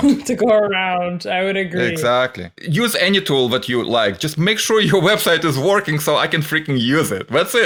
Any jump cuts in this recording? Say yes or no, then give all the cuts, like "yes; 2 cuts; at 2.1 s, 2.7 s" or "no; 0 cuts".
no; 0 cuts